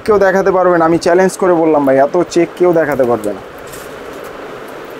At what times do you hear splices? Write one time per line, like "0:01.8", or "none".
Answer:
none